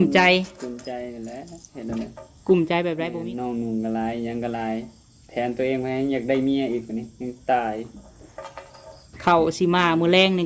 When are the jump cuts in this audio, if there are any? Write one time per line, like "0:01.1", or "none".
0:03.1

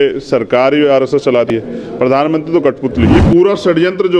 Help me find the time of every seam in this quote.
0:01.5
0:03.1

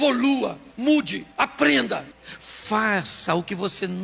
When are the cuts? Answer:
0:02.1

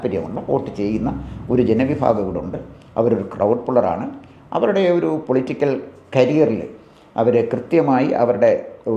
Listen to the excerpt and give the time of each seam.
none

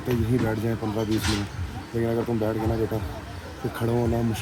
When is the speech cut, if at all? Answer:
none

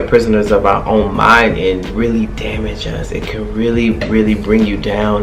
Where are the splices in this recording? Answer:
0:01.9

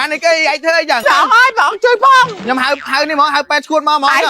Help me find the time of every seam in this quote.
0:01.0
0:02.4

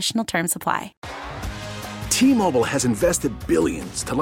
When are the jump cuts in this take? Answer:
0:01.0

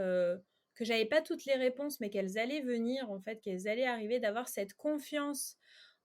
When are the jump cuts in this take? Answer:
none

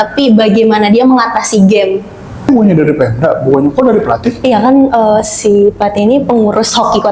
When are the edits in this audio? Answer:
0:02.5

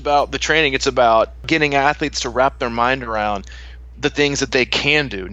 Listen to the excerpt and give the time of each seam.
0:01.5

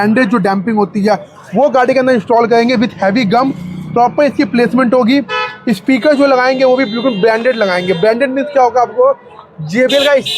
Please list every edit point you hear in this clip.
none

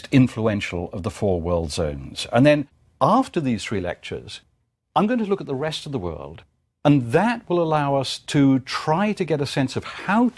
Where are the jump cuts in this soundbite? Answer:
none

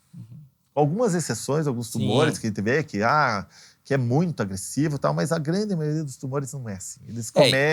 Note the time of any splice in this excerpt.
none

